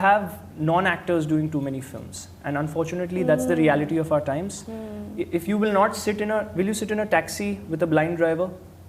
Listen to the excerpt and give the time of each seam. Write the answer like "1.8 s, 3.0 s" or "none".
none